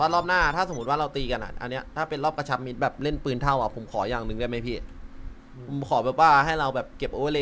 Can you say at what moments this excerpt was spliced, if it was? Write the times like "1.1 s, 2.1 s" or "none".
none